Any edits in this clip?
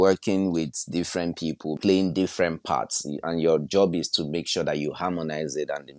yes; 1 cut; at 1.7 s

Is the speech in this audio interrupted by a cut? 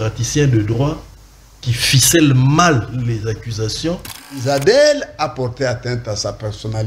yes; 1 cut; at 4.4 s

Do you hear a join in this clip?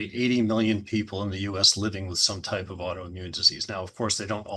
no; 0 cuts

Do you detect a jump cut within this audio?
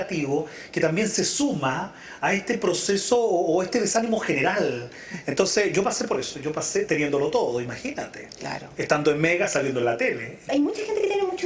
yes; 1 cut; at 10.5 s

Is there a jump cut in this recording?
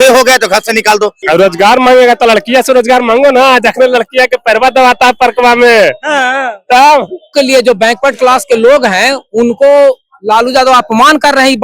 yes; 2 cuts; at 1.2 s, 7.3 s

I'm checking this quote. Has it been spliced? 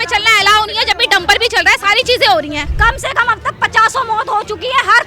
yes; 1 cut; at 2.7 s

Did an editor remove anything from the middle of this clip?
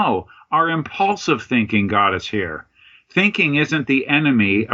no; 0 cuts

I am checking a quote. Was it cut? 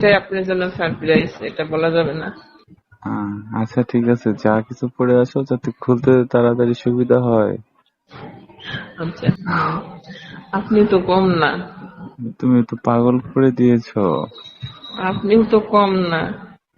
yes; 1 cut; at 9.4 s

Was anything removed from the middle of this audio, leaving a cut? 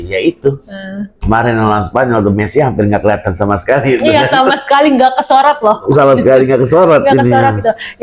no; 0 cuts

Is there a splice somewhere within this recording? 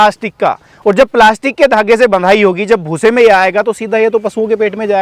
no; 0 cuts

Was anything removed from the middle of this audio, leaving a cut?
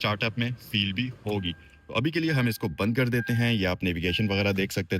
no; 0 cuts

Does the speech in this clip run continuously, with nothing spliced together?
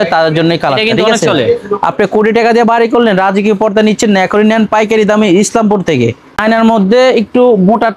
no; 1 cut; at 6.2 s

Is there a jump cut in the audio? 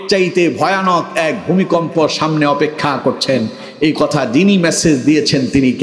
no; 0 cuts

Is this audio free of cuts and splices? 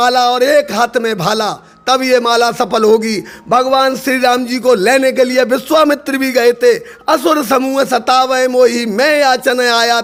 yes; 0 cuts

